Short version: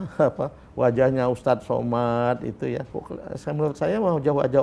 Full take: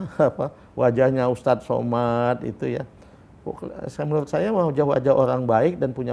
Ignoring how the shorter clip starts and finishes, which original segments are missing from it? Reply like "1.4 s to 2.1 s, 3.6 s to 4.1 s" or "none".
2.9 s to 3.5 s